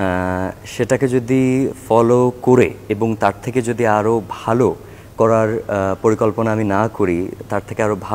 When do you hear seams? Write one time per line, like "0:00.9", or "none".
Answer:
none